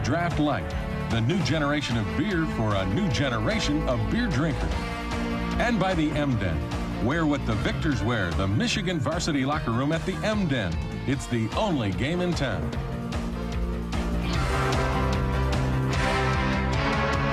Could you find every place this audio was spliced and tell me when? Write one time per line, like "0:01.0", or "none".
none